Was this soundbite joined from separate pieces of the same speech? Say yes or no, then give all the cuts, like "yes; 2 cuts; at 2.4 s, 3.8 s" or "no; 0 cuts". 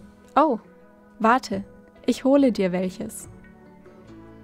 yes; 1 cut; at 3.1 s